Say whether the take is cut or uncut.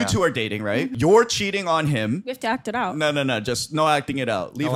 cut